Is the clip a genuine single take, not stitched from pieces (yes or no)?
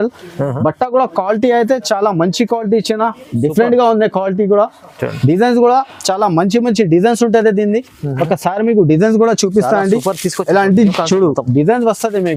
yes